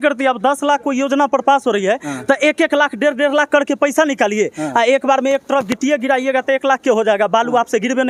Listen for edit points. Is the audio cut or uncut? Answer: uncut